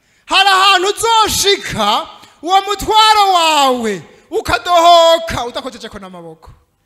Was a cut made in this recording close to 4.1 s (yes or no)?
no